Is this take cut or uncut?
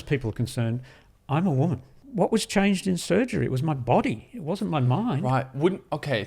cut